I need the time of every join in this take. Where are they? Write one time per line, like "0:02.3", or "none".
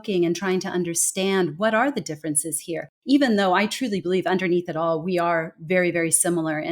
0:02.9